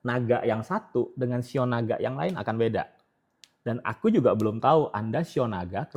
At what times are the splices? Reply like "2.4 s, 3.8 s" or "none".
none

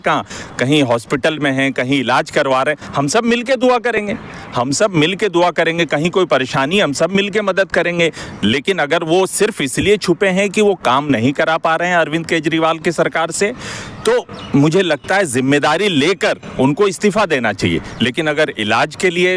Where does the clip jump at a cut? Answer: none

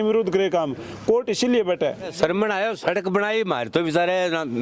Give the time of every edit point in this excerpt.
2.1 s

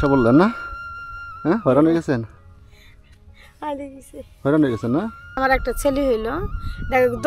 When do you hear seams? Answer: 5.2 s

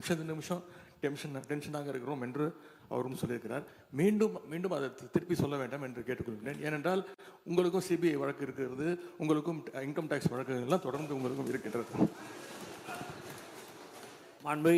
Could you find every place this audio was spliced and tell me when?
none

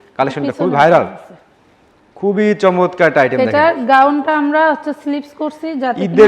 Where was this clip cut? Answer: none

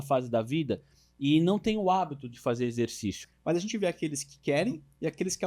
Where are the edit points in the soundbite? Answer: 3.2 s

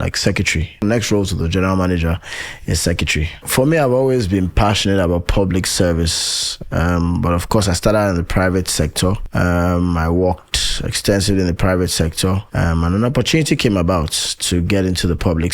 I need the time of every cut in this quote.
0.8 s, 3.4 s, 9.2 s, 12.5 s

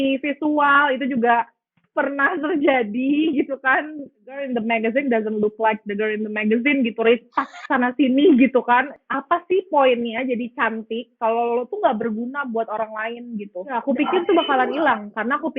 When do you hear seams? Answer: 4.4 s, 9.0 s, 13.7 s

